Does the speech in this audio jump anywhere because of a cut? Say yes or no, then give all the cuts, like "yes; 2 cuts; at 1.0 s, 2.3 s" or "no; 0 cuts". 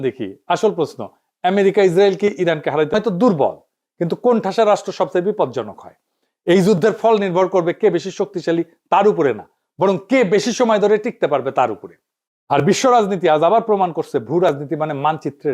yes; 1 cut; at 2.9 s